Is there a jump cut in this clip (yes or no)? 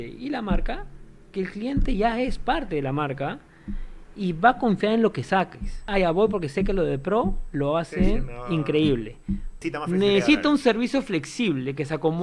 yes